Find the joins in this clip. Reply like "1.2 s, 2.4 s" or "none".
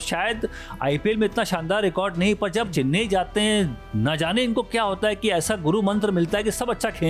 2.7 s